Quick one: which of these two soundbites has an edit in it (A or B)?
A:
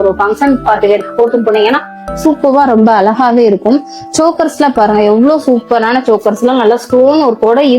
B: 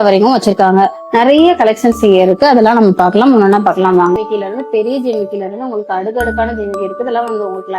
B